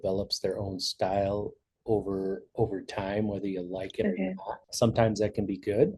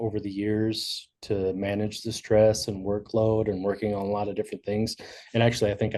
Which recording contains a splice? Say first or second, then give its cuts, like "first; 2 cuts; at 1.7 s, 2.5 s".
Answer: first; 1 cut; at 4.6 s